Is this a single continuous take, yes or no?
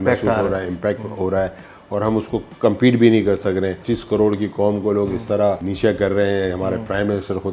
no